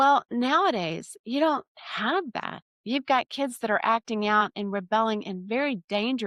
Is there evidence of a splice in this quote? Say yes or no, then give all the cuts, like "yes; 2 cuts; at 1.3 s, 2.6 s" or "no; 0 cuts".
no; 0 cuts